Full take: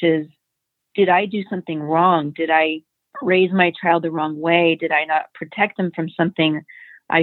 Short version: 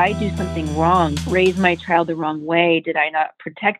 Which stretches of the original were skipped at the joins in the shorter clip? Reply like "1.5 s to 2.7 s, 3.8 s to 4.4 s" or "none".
2.3 s to 3.1 s